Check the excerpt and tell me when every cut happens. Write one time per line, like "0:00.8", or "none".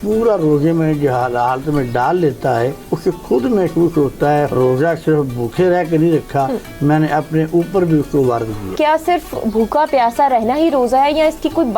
0:02.9
0:04.5
0:08.7